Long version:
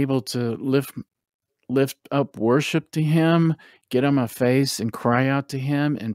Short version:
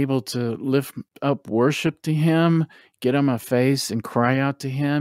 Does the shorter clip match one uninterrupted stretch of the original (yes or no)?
no